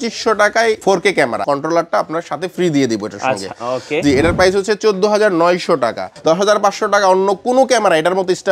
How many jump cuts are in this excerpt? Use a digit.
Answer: 2